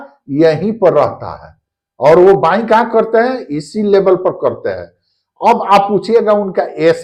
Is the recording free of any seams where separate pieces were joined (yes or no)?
yes